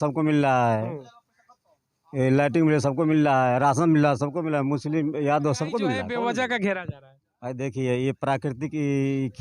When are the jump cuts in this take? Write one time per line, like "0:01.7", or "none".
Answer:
0:06.0